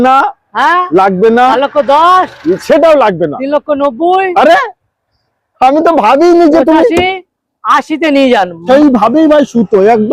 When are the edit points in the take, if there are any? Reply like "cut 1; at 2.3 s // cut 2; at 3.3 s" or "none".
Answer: cut 1; at 8.6 s